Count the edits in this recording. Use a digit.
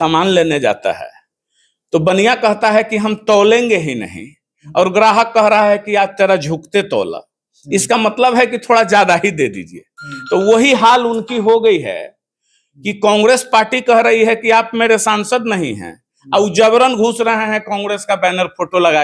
0